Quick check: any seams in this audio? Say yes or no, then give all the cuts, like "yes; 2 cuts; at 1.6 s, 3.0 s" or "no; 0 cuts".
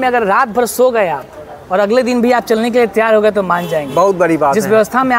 no; 0 cuts